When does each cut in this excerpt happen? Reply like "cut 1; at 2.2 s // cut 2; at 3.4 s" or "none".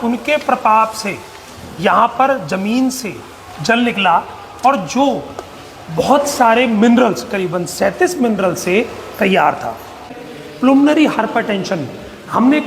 cut 1; at 10.2 s